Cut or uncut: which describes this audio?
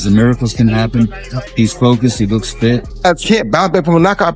cut